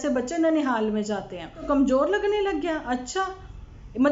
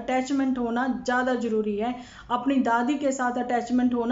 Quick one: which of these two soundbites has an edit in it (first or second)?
first